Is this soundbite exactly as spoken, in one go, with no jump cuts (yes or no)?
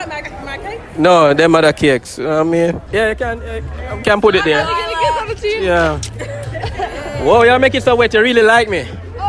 no